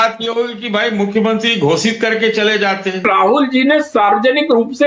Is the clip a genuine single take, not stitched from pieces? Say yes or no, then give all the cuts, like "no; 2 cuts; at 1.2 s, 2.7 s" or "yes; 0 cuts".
no; 1 cut; at 3.0 s